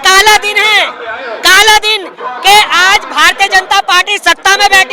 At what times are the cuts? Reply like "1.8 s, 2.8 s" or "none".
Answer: none